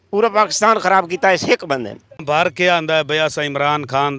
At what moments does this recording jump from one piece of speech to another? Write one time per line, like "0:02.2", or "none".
0:02.2